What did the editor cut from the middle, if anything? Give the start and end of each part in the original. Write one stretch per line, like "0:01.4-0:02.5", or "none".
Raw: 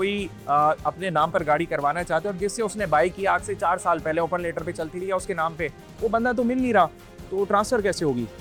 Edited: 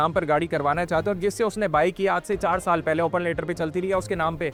none